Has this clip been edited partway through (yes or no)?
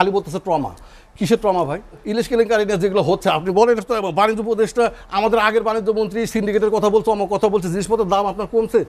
yes